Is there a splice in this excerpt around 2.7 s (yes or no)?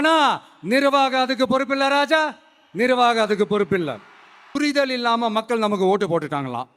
no